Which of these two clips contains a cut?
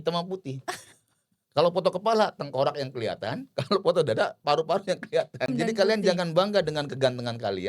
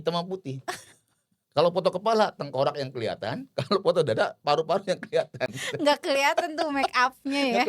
first; 1 cut; at 5.5 s

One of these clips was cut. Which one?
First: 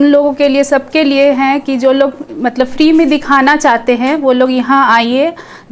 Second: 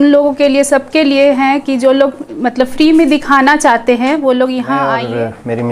second; 1 cut; at 4.8 s

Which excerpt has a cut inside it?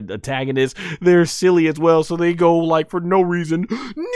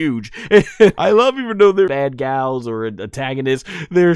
second; 2 cuts; at 1.0 s, 1.9 s

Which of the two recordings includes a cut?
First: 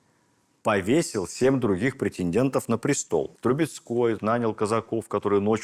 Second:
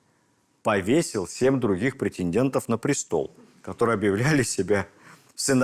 first; 1 cut; at 3.3 s

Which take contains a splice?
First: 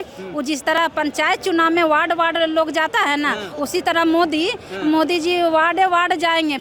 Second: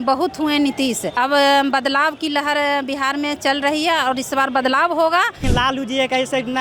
second; 2 cuts; at 1.1 s, 5.4 s

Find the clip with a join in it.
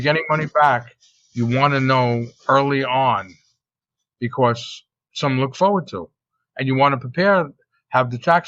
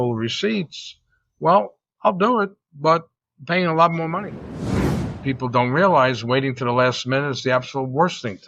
second; 1 cut; at 4.8 s

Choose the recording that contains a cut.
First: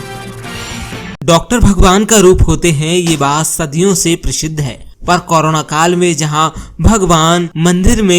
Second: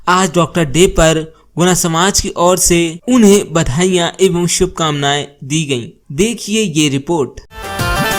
first; 1 cut; at 1.2 s

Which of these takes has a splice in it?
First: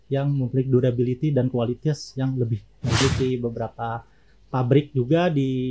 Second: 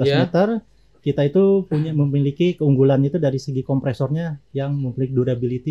first; 1 cut; at 3.0 s

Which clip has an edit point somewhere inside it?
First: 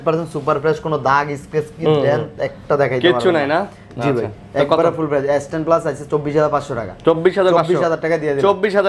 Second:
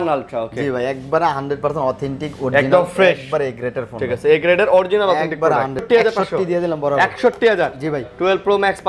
second; 1 cut; at 5.9 s

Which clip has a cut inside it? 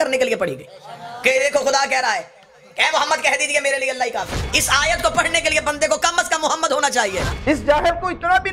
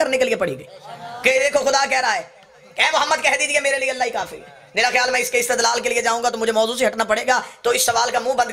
first; 2 cuts; at 4.4 s, 7.3 s

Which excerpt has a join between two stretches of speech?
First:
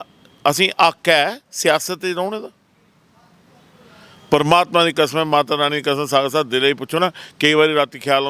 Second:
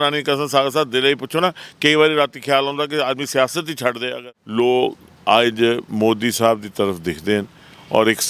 second; 1 cut; at 4.1 s

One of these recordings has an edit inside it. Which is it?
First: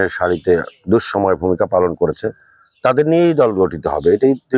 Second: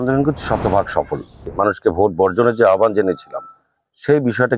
second; 1 cut; at 1.4 s

